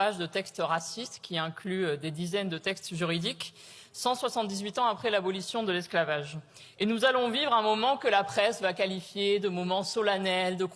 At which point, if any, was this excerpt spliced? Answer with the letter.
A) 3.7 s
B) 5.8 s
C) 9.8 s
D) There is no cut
D